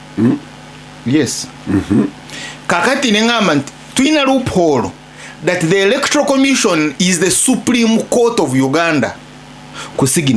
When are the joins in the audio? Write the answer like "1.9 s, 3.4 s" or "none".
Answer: 1.5 s

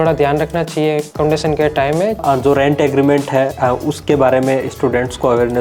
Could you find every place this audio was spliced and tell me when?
1.1 s, 2.2 s

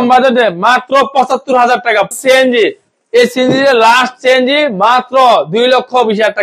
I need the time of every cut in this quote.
2.1 s

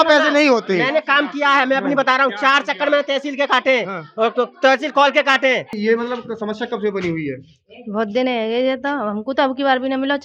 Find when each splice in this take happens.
5.7 s

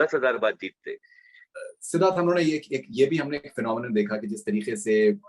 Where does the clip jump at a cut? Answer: 1.4 s

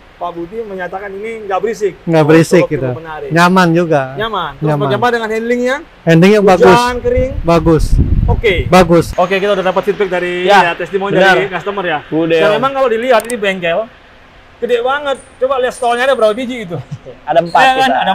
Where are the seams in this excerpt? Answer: 9.1 s

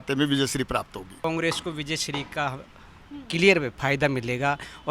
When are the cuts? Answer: 1.1 s

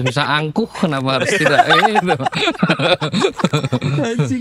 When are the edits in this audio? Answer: none

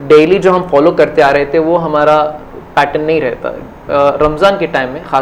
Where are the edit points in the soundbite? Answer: none

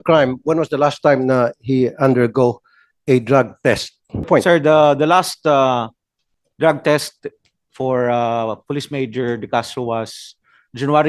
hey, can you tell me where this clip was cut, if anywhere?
4.3 s

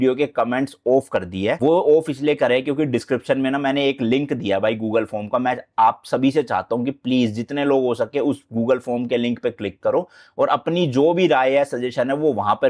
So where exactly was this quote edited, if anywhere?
none

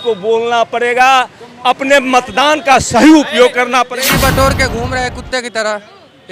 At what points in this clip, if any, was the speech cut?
3.9 s

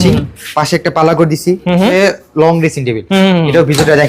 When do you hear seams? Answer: 1.9 s

